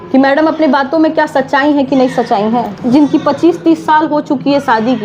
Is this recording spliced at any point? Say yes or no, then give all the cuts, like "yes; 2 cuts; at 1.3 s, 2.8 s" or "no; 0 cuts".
yes; 1 cut; at 2.8 s